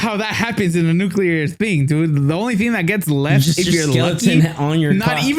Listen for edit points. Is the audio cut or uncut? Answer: uncut